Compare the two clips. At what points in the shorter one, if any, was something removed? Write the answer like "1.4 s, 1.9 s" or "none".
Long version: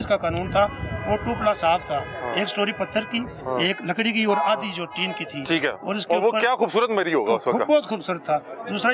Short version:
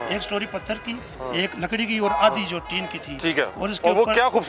none

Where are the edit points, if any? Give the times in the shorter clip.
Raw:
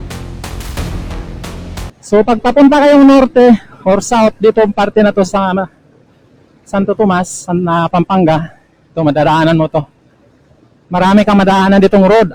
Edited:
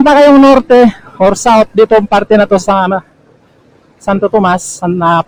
none

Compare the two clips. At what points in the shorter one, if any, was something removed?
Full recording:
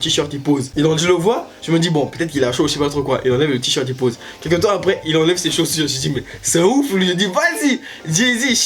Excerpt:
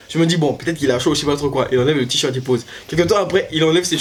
none

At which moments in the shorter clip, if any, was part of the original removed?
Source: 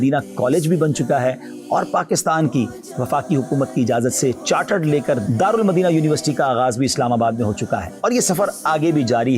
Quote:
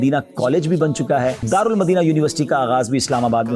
1.4 s

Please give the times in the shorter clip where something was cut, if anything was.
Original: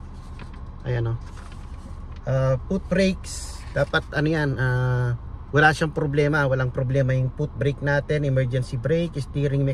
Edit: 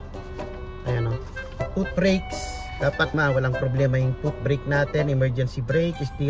1.7 s, 3.1 s

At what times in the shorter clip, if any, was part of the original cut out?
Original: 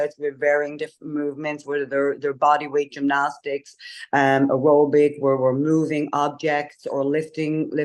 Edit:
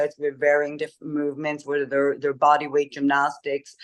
none

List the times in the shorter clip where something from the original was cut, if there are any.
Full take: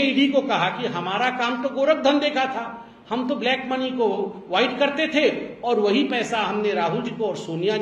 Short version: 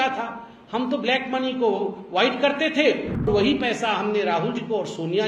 3.3 s

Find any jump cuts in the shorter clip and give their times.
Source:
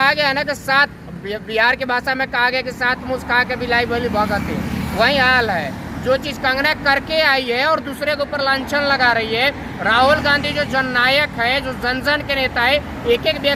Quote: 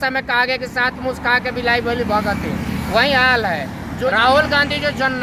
4.1 s

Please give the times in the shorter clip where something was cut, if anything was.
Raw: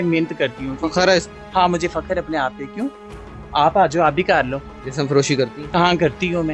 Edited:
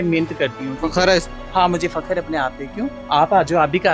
3.0 s

